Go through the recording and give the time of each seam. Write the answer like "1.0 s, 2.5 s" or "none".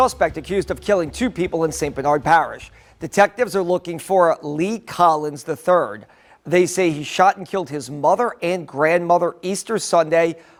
none

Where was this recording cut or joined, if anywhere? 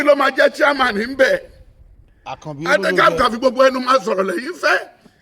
none

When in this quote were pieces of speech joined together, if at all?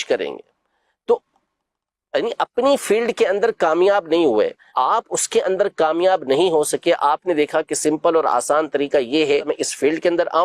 4.6 s, 9.5 s

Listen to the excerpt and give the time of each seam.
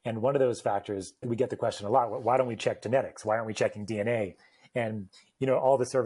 1.3 s

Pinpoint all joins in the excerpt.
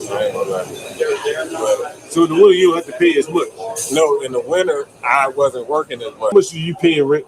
6.3 s

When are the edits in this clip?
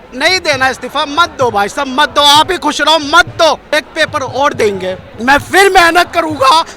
3.7 s, 5.1 s

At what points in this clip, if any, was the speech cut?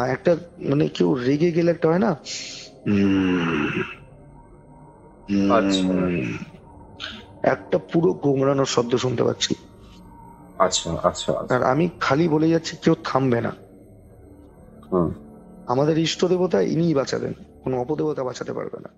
none

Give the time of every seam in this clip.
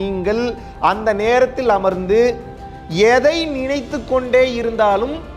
none

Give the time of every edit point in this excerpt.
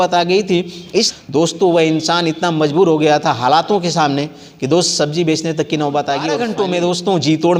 1.1 s, 6.4 s

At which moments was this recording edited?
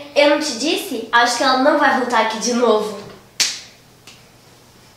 none

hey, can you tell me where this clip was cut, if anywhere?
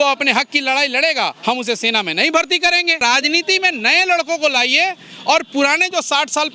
3.0 s

